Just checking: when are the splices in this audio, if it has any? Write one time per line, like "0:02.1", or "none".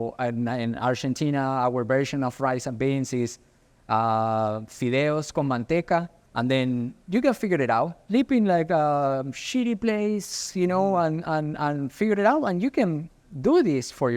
0:06.2